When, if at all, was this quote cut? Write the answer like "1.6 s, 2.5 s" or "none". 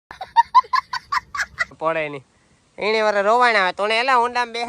1.7 s